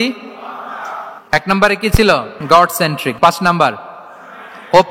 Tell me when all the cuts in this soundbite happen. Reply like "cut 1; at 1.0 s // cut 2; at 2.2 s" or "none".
cut 1; at 2.3 s // cut 2; at 3.2 s